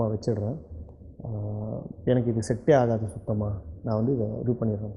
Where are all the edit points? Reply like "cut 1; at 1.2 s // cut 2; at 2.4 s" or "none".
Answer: none